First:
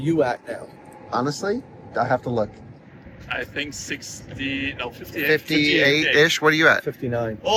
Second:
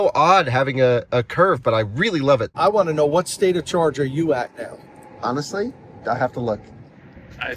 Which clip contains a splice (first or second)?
second